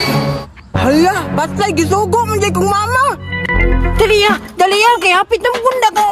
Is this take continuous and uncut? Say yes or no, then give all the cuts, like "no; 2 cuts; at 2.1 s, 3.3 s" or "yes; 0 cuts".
yes; 0 cuts